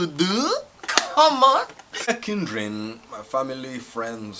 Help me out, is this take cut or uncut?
cut